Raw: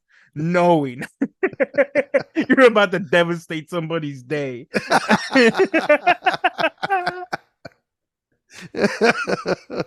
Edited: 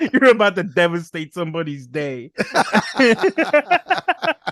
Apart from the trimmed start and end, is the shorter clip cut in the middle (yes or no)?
no